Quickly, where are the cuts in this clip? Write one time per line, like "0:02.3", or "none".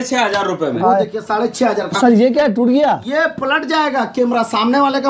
none